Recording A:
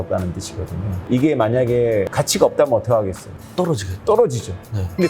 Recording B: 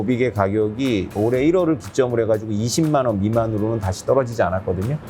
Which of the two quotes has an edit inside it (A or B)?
B